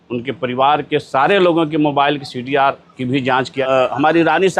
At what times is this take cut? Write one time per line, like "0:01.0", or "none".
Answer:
0:03.5